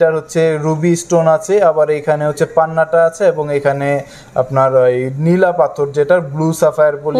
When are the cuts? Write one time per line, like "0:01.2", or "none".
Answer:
none